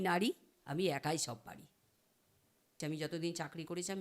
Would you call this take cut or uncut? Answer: cut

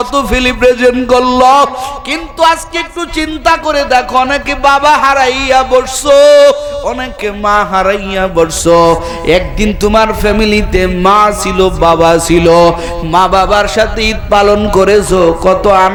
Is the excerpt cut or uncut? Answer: uncut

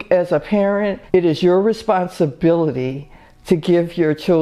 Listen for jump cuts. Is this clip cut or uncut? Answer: cut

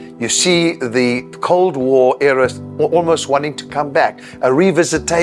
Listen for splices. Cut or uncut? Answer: cut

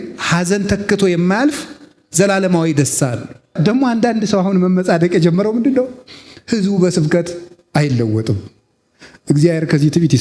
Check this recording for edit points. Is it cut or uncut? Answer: cut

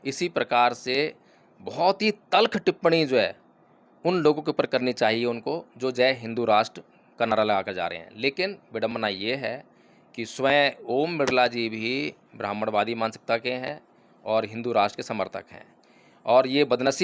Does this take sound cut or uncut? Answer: uncut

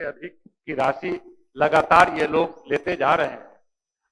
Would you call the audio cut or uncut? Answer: uncut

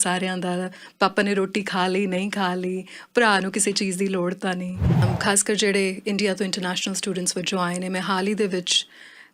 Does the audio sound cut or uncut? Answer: cut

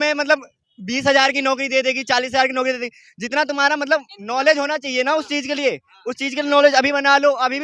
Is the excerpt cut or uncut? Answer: uncut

